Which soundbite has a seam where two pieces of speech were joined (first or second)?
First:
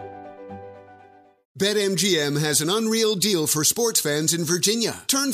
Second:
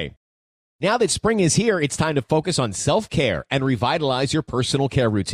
first